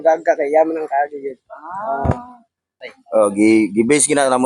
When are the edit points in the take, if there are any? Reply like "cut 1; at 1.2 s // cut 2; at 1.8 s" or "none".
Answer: cut 1; at 2.8 s